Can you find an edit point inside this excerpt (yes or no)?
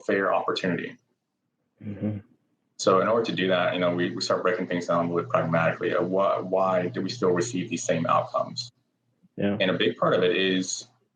no